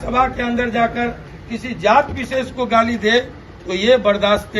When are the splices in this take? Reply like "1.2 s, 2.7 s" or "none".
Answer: none